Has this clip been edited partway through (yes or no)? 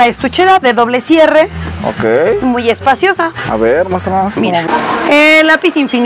yes